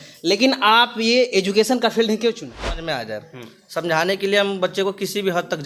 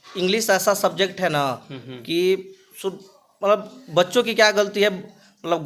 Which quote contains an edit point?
first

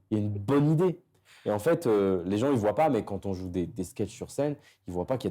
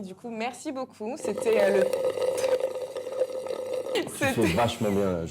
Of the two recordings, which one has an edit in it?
second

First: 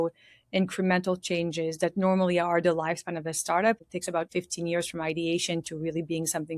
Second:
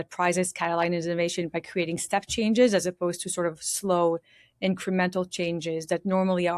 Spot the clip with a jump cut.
first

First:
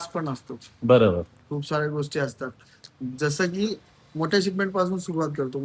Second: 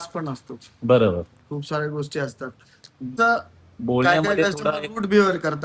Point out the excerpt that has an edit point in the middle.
second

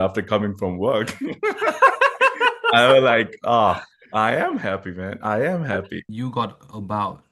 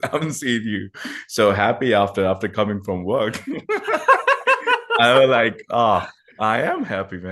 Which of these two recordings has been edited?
first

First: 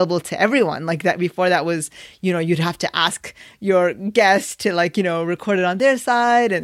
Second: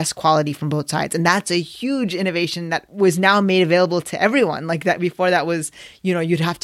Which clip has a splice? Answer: second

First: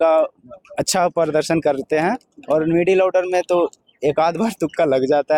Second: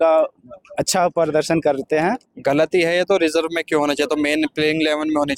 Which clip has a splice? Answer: second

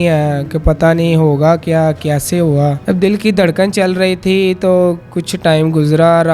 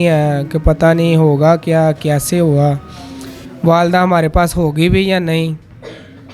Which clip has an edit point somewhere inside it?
first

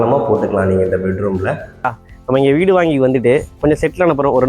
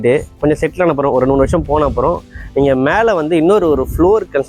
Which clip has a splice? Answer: first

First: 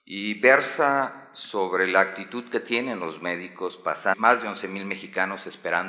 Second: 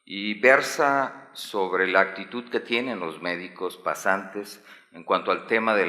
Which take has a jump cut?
second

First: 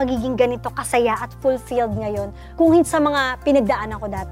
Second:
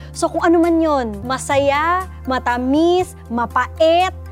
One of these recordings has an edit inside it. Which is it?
second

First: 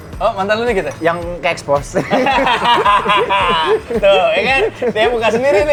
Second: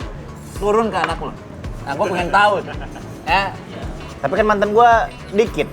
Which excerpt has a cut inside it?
second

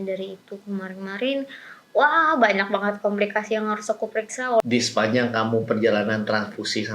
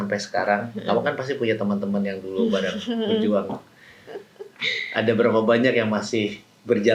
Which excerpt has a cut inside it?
first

